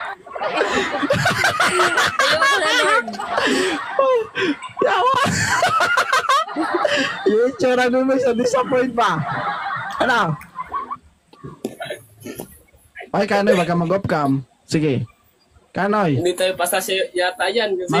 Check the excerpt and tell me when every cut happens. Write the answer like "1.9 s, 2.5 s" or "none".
none